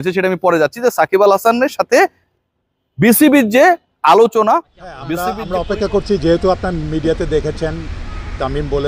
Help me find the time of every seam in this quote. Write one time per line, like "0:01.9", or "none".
0:05.4